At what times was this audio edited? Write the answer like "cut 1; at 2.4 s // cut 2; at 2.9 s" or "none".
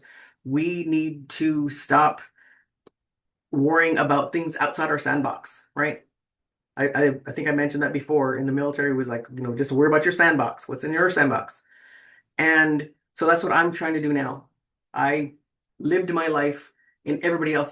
none

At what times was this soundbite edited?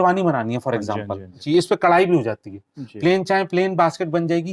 cut 1; at 1.4 s

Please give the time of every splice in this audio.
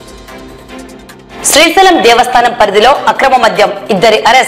cut 1; at 1.4 s

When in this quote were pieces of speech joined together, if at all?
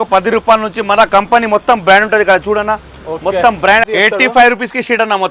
cut 1; at 3.8 s

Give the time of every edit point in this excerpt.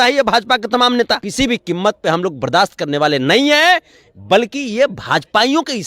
cut 1; at 1.3 s

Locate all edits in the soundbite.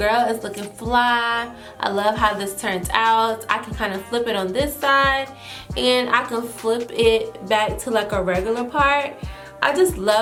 none

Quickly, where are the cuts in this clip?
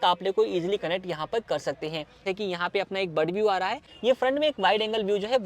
cut 1; at 2.2 s // cut 2; at 3.9 s

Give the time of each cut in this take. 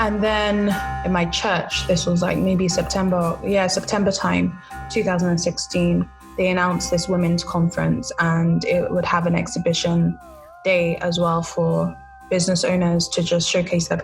cut 1; at 0.9 s

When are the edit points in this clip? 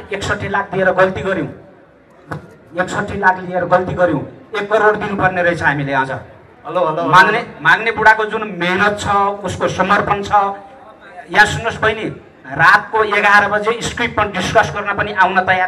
none

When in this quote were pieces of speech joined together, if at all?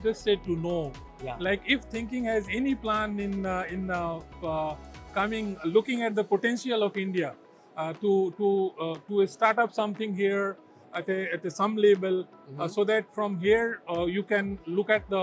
none

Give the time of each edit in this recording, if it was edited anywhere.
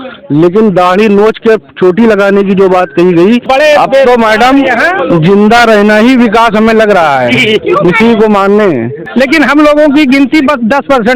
cut 1; at 3.4 s // cut 2; at 9.0 s

